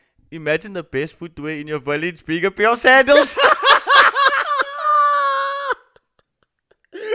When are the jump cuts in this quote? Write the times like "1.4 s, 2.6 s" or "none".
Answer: none

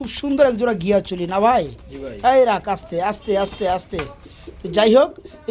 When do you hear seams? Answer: none

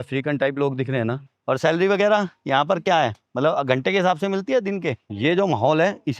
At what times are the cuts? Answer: 1.2 s, 3.2 s, 5.1 s

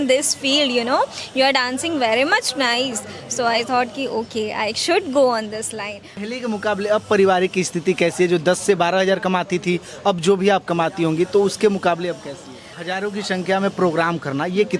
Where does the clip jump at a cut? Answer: 6.2 s, 12.7 s

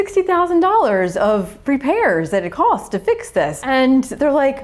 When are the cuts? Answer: 3.6 s

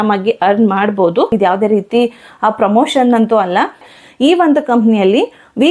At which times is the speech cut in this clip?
1.3 s, 3.9 s

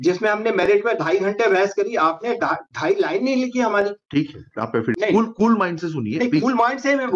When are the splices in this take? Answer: 4.9 s

